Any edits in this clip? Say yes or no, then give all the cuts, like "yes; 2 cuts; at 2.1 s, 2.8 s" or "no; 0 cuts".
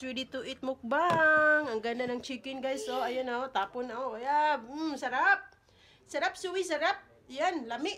no; 0 cuts